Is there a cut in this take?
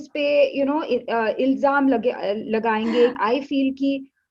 yes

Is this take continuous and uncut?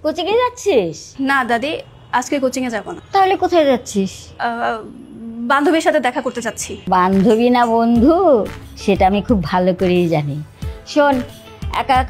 no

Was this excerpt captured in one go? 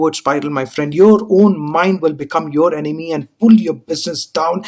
yes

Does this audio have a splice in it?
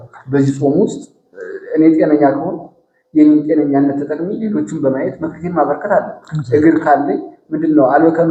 no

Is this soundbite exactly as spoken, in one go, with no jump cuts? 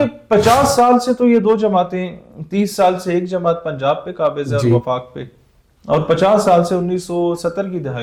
yes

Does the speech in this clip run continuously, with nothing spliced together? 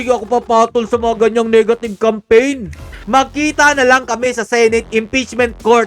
no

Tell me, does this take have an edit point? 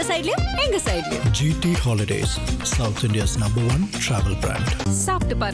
no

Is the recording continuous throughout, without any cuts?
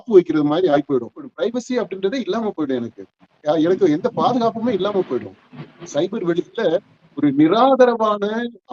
no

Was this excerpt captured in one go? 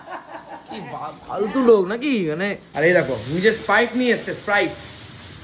no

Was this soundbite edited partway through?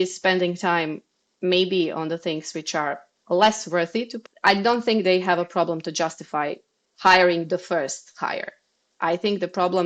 yes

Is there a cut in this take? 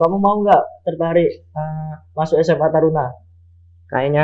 no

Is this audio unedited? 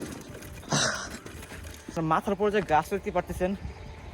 no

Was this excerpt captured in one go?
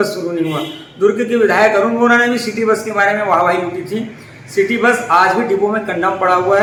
yes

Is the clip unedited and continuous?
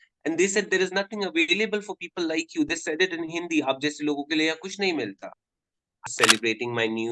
no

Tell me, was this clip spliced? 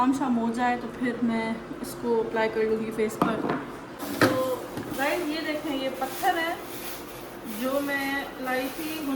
yes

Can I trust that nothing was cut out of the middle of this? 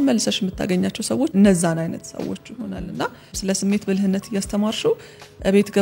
no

